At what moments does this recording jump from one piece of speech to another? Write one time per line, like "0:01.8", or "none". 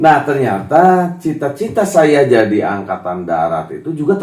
none